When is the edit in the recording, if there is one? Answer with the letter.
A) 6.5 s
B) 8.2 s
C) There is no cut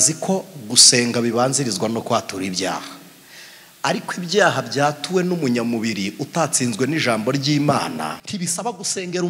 B